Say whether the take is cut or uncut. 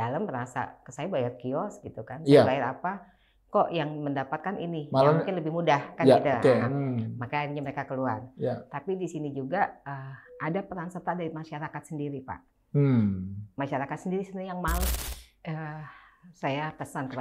cut